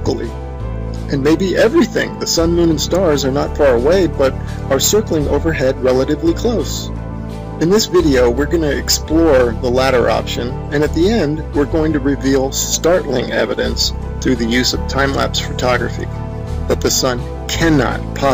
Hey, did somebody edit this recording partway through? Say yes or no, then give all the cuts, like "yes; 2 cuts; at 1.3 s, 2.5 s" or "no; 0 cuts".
yes; 1 cut; at 15.0 s